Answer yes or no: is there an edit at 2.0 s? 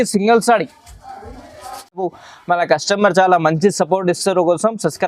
yes